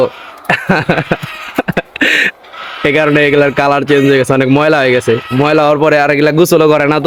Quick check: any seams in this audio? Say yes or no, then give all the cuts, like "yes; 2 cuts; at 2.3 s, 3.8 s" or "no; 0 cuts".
no; 0 cuts